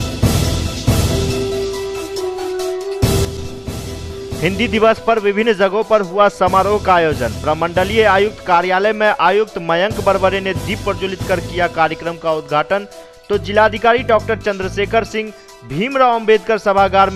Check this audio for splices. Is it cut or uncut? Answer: cut